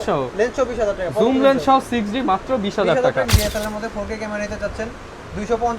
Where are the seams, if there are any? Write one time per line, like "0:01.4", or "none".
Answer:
0:03.2